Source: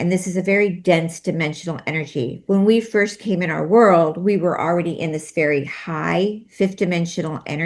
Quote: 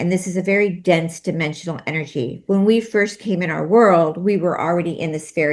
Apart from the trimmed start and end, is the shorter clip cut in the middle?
no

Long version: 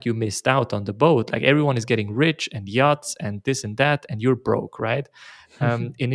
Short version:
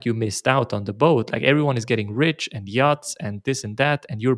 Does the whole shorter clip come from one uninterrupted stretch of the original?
yes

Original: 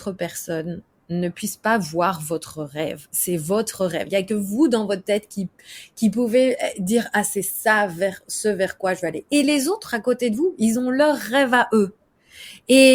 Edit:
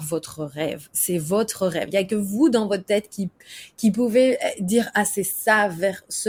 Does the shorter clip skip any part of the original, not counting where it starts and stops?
no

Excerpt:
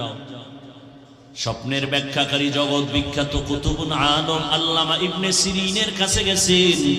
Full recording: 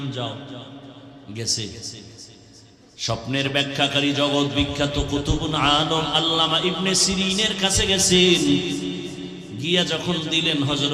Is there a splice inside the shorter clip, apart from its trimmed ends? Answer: yes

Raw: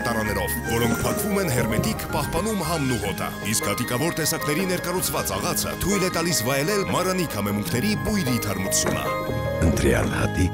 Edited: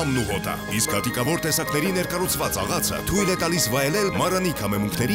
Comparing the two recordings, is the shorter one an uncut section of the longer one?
yes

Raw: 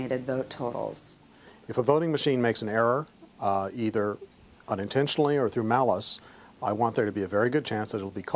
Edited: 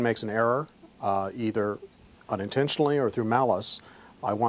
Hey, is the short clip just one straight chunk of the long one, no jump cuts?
yes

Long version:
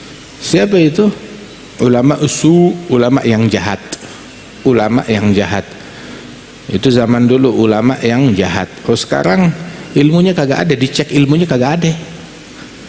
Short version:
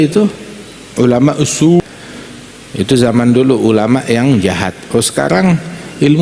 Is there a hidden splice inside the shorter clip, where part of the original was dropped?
yes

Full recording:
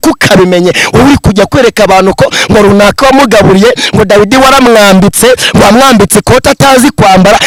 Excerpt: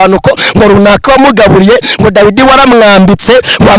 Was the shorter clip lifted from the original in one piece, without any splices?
yes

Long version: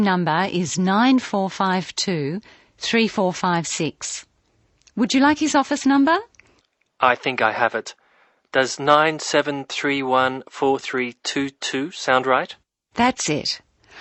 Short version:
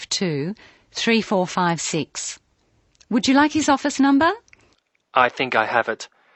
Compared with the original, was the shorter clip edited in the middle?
no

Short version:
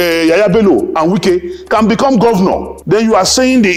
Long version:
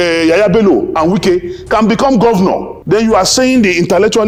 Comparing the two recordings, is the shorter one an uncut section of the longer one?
yes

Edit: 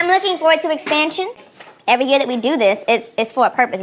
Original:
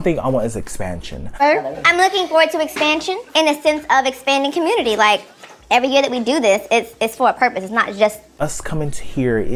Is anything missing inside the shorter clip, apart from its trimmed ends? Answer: yes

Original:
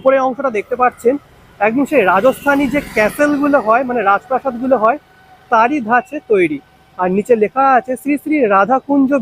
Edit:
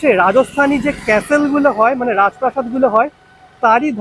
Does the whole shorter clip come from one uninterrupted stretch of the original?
yes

